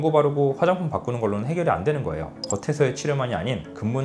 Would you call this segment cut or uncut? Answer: uncut